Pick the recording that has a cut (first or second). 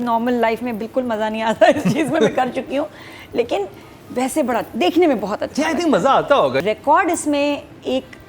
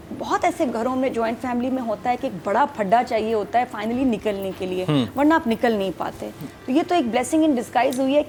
first